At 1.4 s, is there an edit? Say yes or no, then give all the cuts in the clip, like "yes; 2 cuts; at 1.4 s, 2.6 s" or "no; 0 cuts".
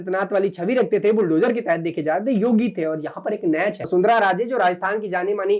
no; 1 cut; at 3.8 s